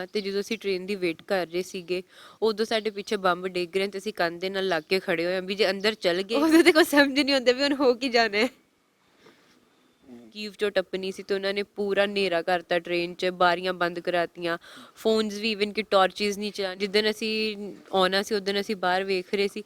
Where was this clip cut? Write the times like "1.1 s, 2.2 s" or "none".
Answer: 6.3 s, 10.4 s, 16.6 s